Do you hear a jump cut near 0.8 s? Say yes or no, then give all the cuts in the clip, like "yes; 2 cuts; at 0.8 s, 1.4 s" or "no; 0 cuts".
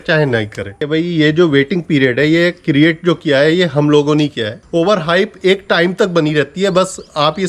yes; 2 cuts; at 0.8 s, 4.5 s